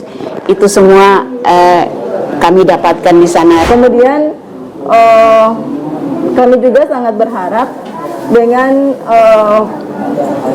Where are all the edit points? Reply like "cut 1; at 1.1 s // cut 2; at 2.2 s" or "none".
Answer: cut 1; at 3.6 s